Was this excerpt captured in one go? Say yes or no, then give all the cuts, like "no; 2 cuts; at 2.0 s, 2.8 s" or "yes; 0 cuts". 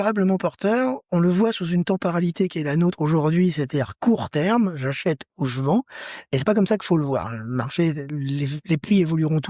yes; 0 cuts